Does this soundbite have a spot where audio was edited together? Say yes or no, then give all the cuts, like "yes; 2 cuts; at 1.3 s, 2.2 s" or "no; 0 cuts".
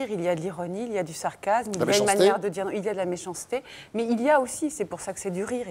no; 0 cuts